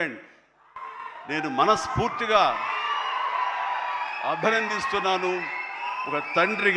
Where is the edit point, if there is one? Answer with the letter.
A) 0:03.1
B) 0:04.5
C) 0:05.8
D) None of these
D